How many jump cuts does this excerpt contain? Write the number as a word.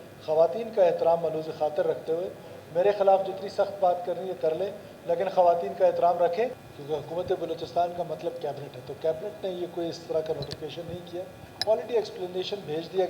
one